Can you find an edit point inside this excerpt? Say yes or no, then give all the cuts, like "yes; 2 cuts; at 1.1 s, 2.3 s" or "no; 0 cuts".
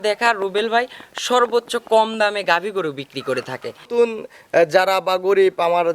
yes; 1 cut; at 3.9 s